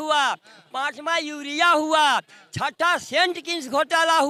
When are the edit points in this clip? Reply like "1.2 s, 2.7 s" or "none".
none